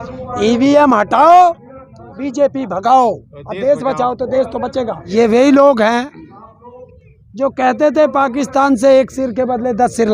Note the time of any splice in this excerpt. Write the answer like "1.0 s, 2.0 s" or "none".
5.0 s